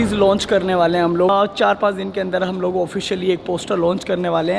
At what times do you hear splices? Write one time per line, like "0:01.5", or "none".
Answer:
0:01.3